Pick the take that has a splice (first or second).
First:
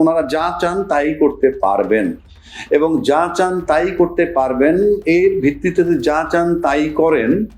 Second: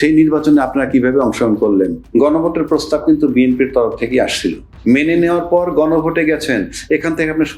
second